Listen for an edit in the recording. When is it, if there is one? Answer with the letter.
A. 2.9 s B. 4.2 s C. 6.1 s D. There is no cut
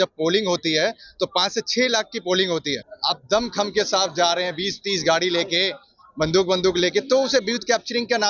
A